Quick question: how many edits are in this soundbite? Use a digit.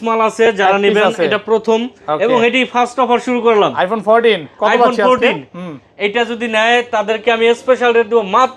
0